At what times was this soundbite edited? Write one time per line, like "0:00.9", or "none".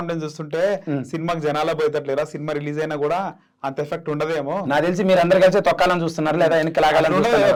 none